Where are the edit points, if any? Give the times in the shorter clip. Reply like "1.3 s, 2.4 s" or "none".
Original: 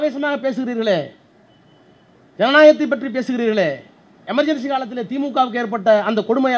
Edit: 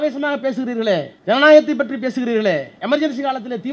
1.1 s, 2.7 s